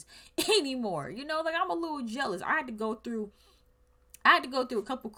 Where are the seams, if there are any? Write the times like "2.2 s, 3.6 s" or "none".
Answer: none